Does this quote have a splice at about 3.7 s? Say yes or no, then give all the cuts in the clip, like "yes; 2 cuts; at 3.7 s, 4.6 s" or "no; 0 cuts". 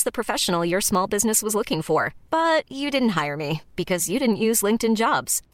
no; 0 cuts